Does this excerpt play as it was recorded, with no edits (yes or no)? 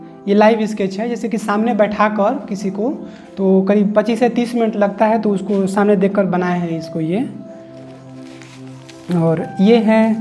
no